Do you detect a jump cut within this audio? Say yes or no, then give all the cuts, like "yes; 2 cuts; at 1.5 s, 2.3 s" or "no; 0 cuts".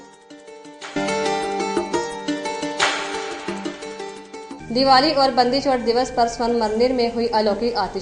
yes; 1 cut; at 1.0 s